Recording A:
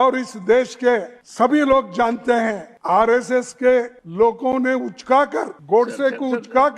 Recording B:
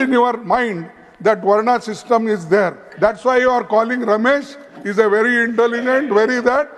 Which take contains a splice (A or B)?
A